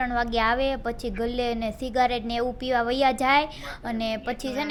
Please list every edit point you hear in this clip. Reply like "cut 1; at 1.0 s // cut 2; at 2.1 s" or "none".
none

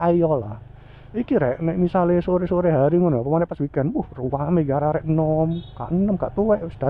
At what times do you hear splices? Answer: none

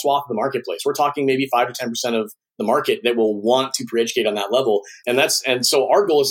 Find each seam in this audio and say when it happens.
cut 1; at 4.9 s

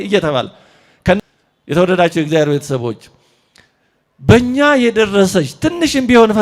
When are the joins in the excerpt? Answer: cut 1; at 1.2 s

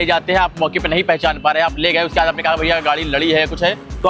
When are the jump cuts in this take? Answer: none

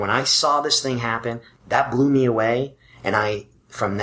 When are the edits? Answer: cut 1; at 1.5 s

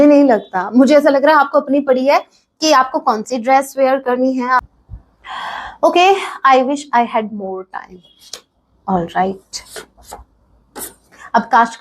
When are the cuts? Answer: cut 1; at 4.6 s

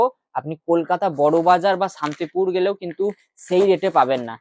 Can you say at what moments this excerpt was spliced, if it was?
none

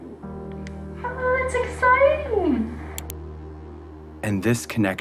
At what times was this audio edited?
cut 1; at 2.2 s

